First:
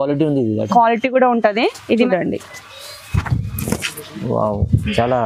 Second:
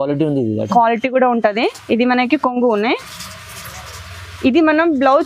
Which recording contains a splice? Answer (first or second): first